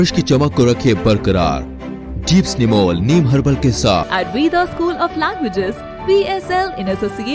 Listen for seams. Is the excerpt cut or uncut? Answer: cut